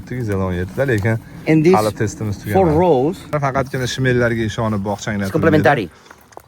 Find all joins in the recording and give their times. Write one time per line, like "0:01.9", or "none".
0:03.3